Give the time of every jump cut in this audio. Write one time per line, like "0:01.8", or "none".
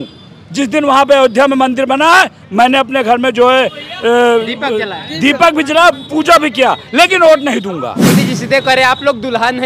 0:08.1